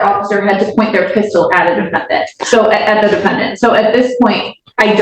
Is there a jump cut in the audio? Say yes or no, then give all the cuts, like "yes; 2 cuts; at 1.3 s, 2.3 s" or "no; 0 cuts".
no; 0 cuts